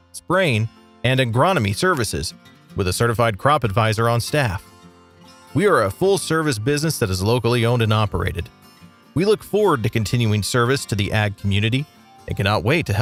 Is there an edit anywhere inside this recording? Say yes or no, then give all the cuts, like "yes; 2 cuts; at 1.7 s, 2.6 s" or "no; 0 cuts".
no; 0 cuts